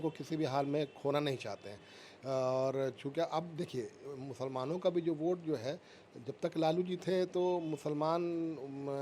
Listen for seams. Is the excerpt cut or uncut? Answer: uncut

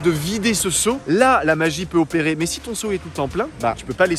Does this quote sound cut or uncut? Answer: uncut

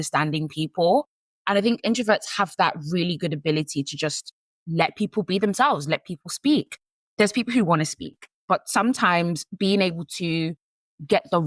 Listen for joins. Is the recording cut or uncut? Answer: cut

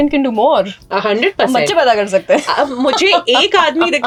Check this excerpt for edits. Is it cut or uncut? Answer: uncut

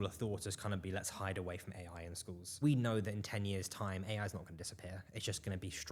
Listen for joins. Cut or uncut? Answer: cut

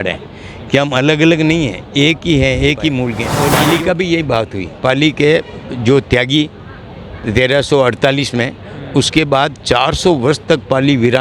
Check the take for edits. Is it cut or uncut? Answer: cut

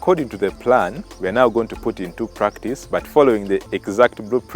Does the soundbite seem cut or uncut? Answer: cut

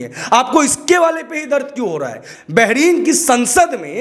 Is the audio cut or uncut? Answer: cut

